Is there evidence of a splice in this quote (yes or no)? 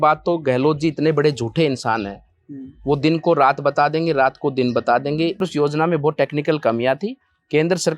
yes